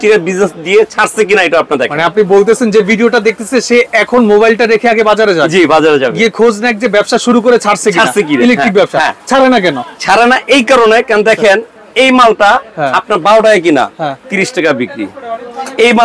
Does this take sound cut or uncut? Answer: uncut